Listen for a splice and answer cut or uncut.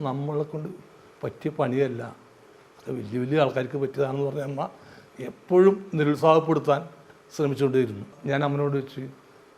cut